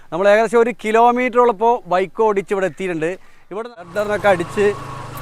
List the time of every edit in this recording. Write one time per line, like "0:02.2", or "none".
0:03.5